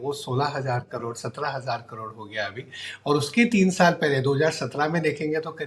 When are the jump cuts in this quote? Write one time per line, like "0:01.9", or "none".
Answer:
none